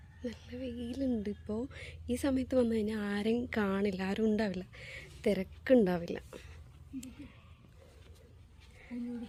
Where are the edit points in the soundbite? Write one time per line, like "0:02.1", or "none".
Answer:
none